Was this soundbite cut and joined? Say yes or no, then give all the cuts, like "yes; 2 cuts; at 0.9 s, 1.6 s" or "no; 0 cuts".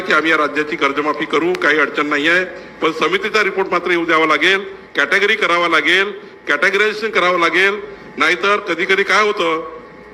no; 0 cuts